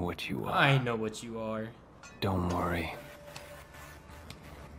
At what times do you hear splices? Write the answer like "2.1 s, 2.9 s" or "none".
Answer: none